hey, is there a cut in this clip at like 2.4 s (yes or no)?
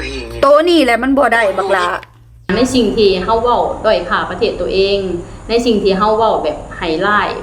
yes